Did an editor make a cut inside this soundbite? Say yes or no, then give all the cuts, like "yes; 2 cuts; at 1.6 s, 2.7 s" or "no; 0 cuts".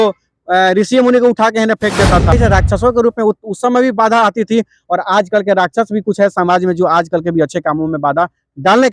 yes; 1 cut; at 2.3 s